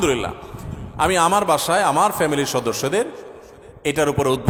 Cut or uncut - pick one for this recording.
uncut